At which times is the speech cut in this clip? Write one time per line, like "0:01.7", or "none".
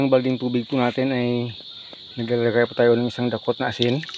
none